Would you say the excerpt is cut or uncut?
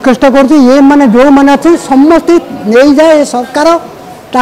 uncut